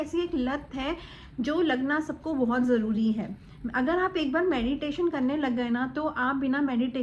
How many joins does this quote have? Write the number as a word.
zero